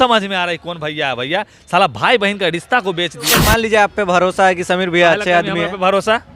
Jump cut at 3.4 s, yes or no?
yes